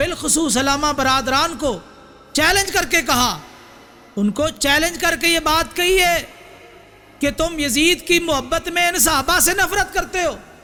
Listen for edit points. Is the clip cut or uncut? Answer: uncut